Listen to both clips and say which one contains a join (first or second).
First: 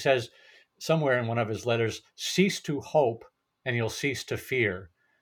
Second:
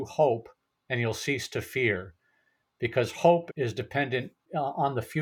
second